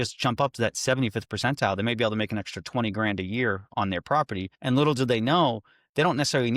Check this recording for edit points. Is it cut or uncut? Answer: cut